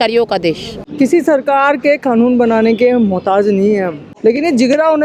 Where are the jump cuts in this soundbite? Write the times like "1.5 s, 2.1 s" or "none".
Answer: 0.9 s, 4.0 s